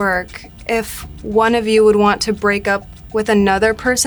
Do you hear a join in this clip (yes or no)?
no